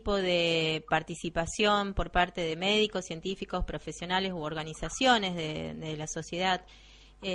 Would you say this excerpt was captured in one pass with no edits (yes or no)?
yes